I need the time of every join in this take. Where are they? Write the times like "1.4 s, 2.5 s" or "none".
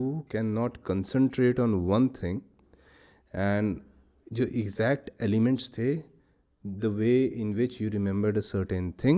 none

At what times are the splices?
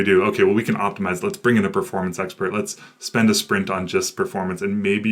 none

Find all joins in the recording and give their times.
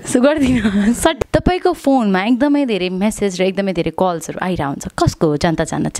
1.2 s

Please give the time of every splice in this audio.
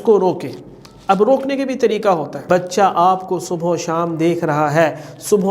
2.5 s

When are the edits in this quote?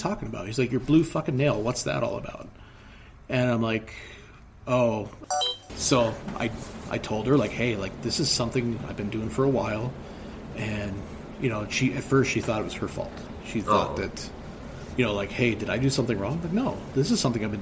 5.2 s

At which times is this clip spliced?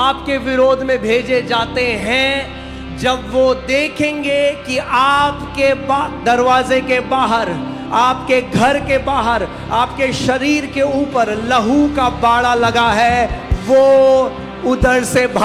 none

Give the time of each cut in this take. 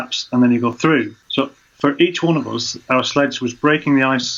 1.2 s

